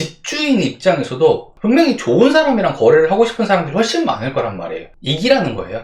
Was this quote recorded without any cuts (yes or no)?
no